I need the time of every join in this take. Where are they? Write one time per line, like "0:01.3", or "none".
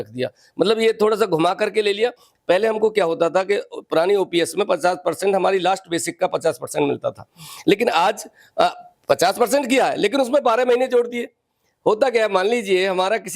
0:02.2